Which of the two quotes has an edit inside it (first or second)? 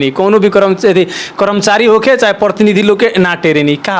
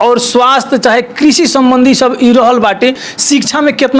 second